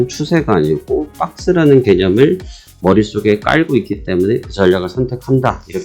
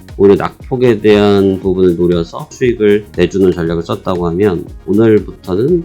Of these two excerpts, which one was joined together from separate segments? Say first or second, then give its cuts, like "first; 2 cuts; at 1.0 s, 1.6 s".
second; 1 cut; at 2.7 s